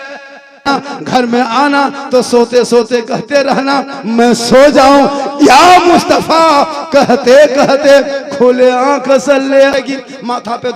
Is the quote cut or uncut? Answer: cut